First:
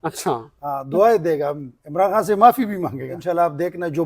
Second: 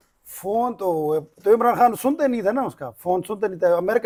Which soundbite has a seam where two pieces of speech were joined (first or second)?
first